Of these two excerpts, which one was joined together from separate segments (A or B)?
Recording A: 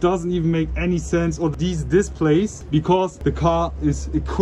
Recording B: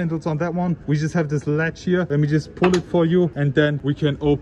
B